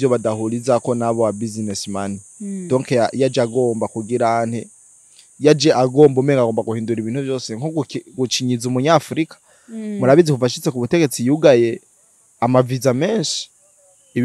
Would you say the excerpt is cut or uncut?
uncut